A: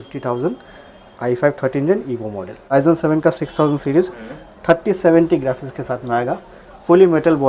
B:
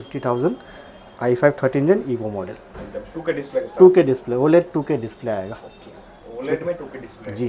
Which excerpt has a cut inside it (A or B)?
A